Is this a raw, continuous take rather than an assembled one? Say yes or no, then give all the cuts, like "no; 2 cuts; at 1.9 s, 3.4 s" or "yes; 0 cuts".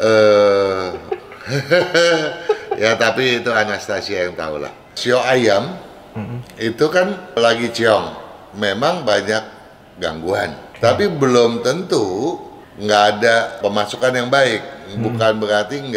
no; 4 cuts; at 5.0 s, 7.4 s, 10.6 s, 13.6 s